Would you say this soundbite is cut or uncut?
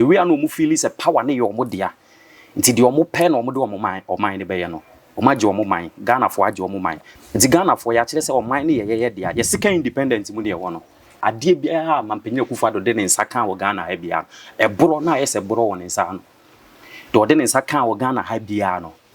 cut